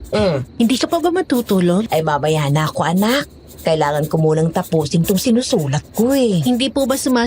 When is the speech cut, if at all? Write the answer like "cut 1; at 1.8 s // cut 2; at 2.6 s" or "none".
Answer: cut 1; at 1.9 s